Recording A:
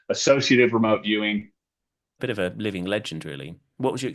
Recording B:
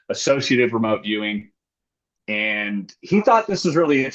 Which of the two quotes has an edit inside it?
A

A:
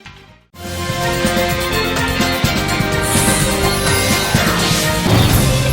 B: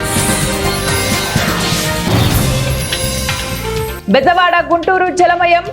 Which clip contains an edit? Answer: B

